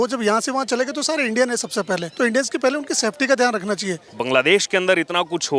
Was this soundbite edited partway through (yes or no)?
yes